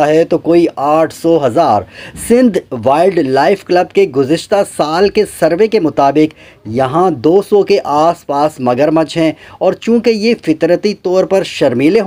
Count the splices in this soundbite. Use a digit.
0